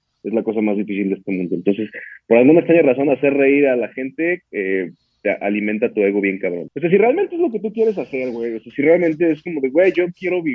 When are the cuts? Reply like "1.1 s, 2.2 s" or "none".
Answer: 6.7 s